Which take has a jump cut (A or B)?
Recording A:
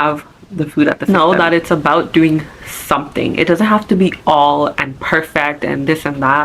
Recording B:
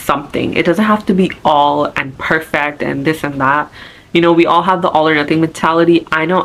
A